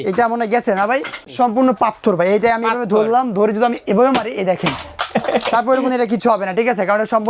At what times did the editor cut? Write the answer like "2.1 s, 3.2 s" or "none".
1.3 s